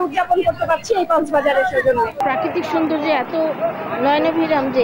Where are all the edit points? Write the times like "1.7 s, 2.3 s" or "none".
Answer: 2.1 s